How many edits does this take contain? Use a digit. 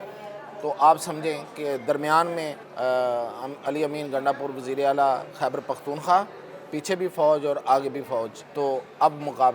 2